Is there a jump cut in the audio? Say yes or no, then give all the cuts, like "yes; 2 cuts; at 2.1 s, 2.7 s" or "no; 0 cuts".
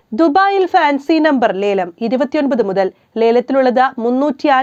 no; 0 cuts